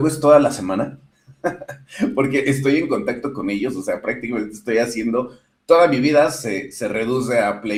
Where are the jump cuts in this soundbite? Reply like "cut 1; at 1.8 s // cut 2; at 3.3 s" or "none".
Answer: none